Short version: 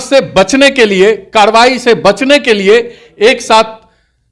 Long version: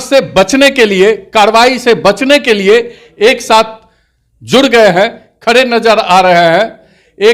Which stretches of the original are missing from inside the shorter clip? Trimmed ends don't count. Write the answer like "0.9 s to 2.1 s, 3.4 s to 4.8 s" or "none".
none